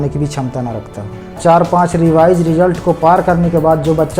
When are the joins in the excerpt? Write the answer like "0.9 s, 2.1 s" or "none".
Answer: 1.4 s

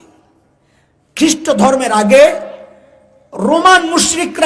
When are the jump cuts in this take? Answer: none

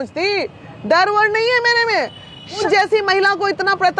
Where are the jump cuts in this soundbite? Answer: 2.6 s

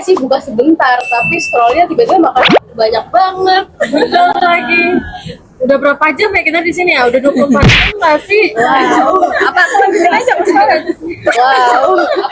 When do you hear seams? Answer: none

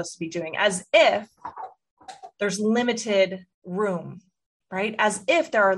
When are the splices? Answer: 3.5 s

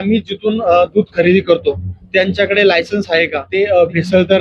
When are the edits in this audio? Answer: 3.4 s

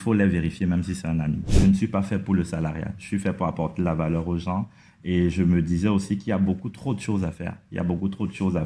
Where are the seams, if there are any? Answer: 1.5 s

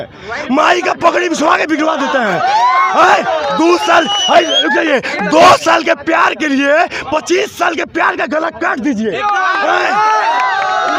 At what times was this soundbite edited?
none

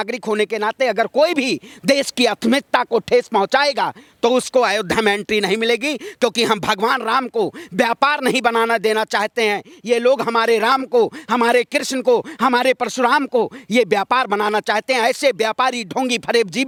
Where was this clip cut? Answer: none

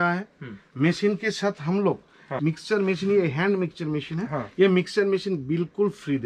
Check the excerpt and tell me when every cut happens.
2.3 s

